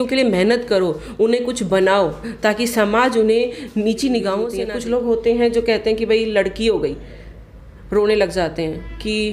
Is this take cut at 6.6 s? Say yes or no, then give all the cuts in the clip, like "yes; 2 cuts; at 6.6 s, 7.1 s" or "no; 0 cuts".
no; 1 cut; at 4.6 s